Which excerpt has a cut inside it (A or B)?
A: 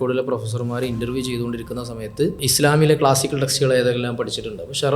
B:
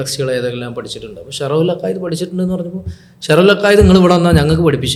A